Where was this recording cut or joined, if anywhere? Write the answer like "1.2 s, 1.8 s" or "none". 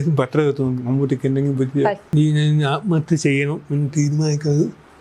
2.0 s